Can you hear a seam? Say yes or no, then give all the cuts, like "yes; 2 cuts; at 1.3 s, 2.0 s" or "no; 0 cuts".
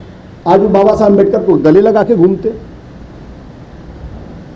no; 0 cuts